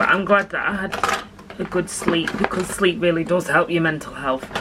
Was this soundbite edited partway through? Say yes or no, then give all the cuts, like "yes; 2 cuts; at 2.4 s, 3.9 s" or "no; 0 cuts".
no; 0 cuts